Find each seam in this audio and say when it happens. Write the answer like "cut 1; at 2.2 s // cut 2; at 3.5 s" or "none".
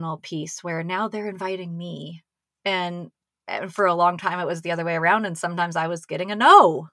none